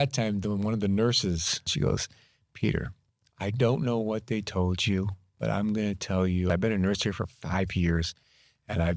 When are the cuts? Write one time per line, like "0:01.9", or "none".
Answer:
0:01.7
0:06.5